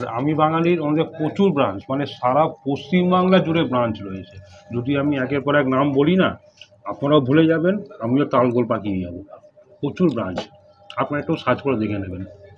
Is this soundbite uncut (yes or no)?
yes